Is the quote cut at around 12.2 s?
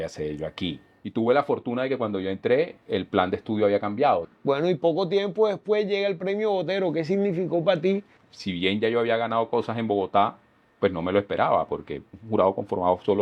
yes; 4 cuts; at 1.0 s, 4.3 s, 8.2 s, 12.2 s

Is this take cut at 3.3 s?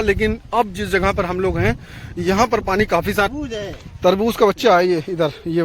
yes; 1 cut; at 3.3 s

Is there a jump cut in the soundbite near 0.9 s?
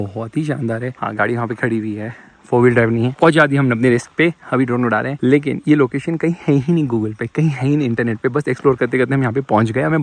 no; 0 cuts

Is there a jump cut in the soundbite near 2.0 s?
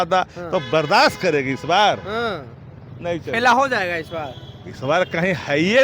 no; 0 cuts

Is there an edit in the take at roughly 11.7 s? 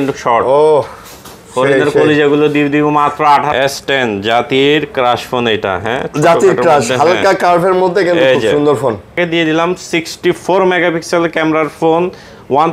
no; 2 cuts; at 3.5 s, 9.2 s

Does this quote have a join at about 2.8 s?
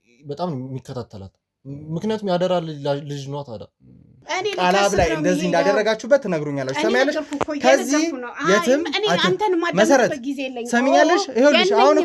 no; 1 cut; at 4.2 s

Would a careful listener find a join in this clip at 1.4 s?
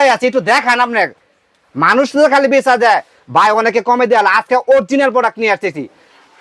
no; 0 cuts

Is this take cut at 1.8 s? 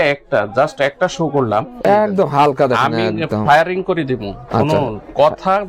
yes; 1 cut; at 1.8 s

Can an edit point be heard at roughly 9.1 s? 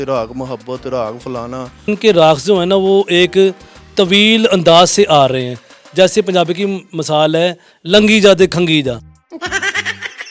yes; 2 cuts; at 1.9 s, 9.1 s

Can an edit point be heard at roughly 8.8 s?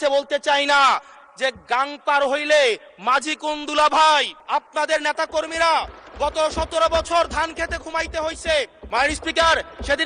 yes; 2 cuts; at 4.4 s, 8.8 s

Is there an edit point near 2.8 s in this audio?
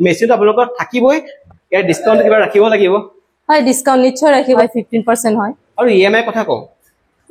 no; 3 cuts; at 1.3 s, 4.6 s, 5.6 s

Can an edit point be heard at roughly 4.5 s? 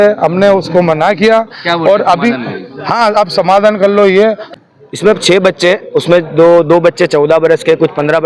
yes; 1 cut; at 4.5 s

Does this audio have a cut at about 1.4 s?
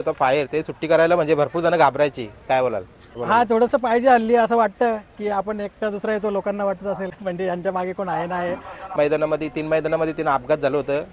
no; 3 cuts; at 3.2 s, 7.1 s, 8.9 s

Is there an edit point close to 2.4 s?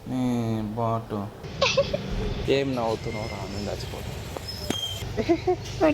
yes; 2 cuts; at 1.4 s, 2.4 s

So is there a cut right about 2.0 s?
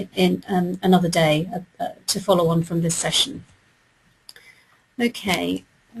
no; 1 cut; at 4.0 s

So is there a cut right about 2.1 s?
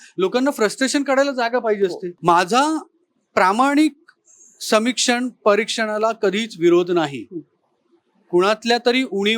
yes; 1 cut; at 2.1 s

